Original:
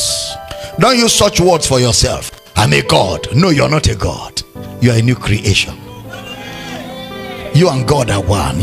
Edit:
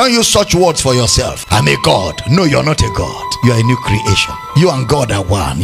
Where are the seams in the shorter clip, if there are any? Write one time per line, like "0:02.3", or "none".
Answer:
0:01.4
0:03.2
0:04.4